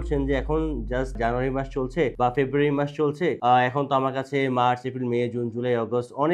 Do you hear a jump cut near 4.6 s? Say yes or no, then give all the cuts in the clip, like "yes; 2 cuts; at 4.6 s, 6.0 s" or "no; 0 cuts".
no; 3 cuts; at 1.2 s, 2.1 s, 3.4 s